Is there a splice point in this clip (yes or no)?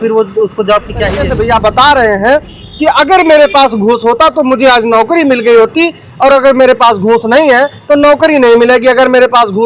yes